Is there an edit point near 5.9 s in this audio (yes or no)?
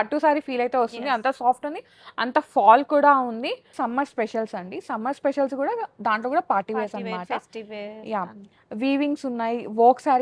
no